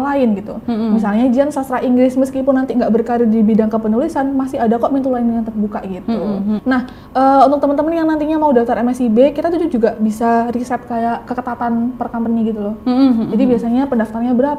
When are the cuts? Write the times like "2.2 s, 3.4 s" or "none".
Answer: 6.6 s